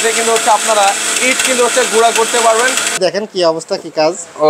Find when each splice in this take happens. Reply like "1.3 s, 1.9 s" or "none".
3.0 s